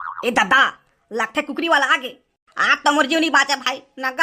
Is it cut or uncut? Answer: uncut